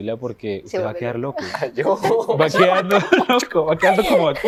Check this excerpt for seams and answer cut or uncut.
uncut